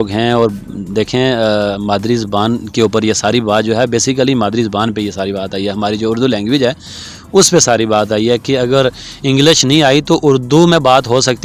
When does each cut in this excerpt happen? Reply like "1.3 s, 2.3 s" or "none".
none